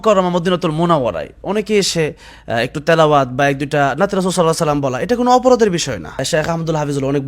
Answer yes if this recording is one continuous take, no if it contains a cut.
no